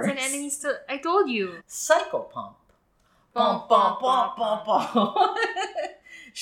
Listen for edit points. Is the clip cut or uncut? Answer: cut